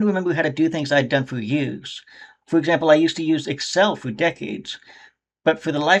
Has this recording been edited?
no; 0 cuts

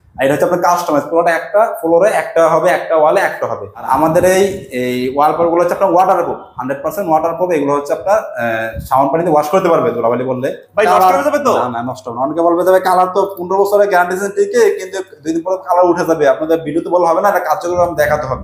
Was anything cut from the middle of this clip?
yes; 2 cuts; at 3.8 s, 10.6 s

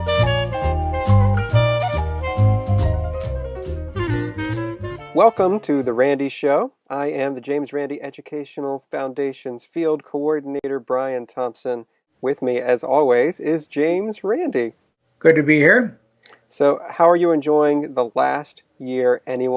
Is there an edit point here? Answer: no; 0 cuts

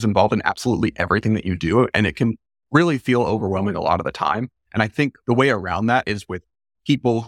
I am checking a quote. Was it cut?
yes; 1 cut; at 5.2 s

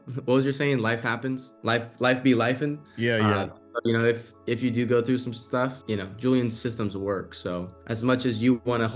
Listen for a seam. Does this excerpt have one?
yes; 4 cuts; at 1.5 s, 4.3 s, 5.8 s, 7.7 s

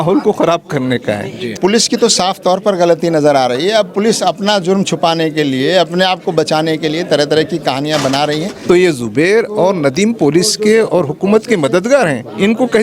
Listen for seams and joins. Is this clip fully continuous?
no; 2 cuts; at 1.4 s, 8.5 s

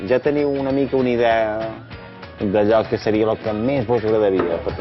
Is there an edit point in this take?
no; 0 cuts

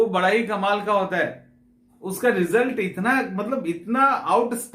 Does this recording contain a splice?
no; 0 cuts

